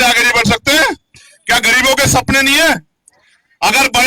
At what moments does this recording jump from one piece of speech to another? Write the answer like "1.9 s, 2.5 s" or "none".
none